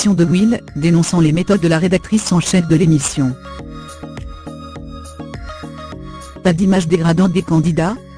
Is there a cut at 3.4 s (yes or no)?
yes